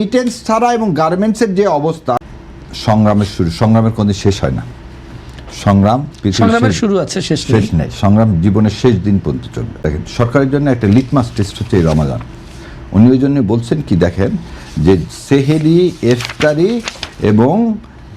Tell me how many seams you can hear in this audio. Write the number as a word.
two